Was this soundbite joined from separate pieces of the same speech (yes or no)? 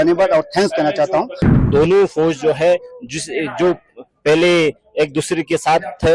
yes